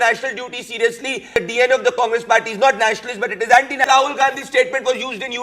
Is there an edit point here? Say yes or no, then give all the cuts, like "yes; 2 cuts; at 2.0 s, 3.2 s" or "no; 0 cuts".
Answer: yes; 2 cuts; at 1.4 s, 3.8 s